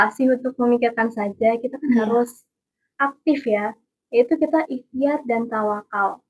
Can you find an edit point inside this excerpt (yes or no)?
no